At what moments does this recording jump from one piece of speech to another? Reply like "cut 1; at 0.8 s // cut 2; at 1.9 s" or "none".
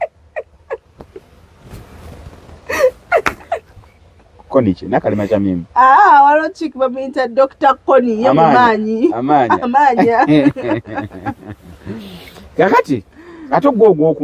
none